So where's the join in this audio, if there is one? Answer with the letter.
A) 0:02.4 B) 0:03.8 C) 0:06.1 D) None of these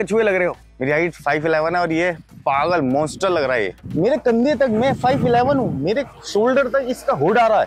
B